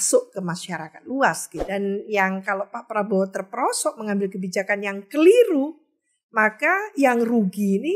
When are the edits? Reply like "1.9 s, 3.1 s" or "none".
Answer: 1.7 s